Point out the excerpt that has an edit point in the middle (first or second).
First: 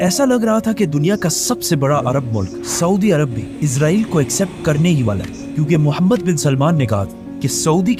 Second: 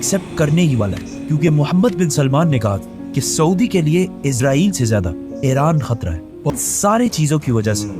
second